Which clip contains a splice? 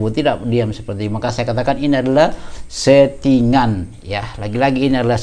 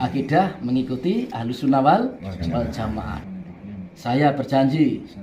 second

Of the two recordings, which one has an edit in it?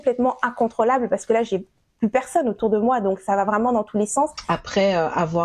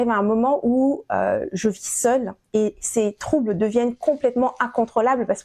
first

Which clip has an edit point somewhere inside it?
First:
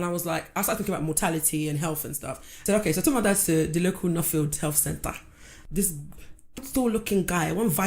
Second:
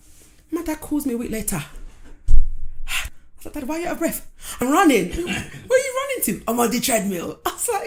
first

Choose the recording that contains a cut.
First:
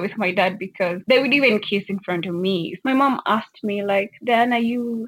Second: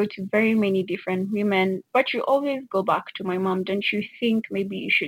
first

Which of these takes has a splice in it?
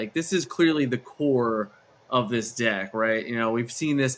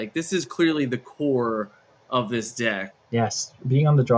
second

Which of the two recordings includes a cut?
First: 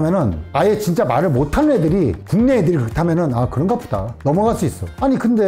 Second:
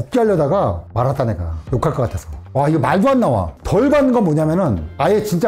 second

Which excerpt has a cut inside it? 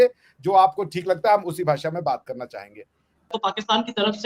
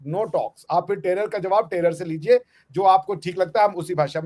first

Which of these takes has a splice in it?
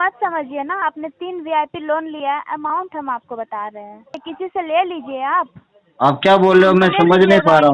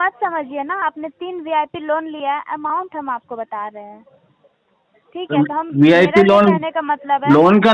first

